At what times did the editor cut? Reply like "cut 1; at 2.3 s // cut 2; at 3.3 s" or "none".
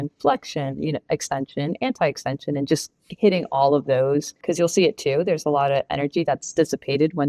cut 1; at 4.4 s

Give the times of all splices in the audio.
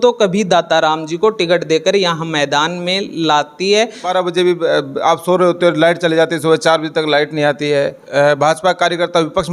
cut 1; at 4.1 s // cut 2; at 8.0 s

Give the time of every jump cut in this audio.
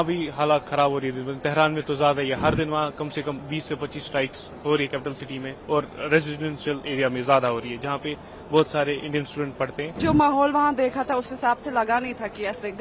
cut 1; at 10.0 s

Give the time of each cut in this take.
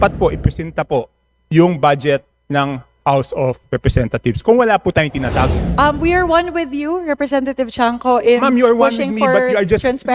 cut 1; at 5.6 s

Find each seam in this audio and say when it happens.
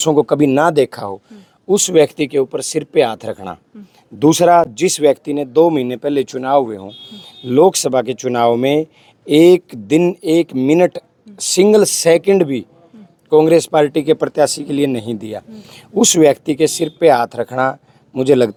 none

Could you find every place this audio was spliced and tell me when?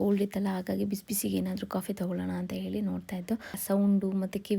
cut 1; at 3.6 s

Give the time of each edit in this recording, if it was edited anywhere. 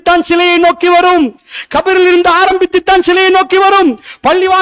none

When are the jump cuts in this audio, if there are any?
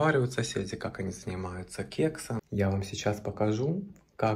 cut 1; at 2.4 s

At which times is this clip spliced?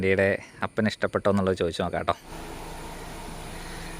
cut 1; at 2.3 s

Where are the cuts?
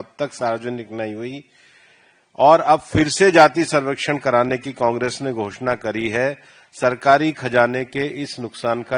none

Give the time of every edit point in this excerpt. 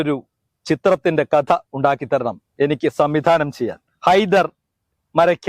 cut 1; at 3.8 s

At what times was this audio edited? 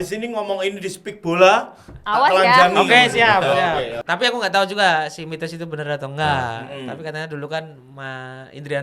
cut 1; at 4.0 s

